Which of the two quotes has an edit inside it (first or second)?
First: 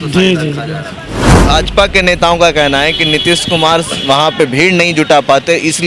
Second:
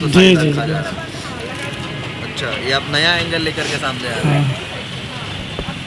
first